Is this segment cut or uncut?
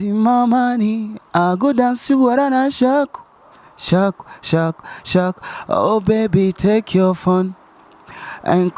uncut